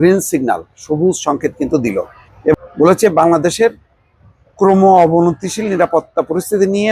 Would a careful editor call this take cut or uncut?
cut